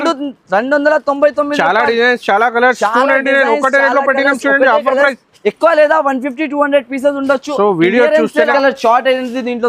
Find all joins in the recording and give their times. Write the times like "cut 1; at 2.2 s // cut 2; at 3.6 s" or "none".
cut 1; at 8.5 s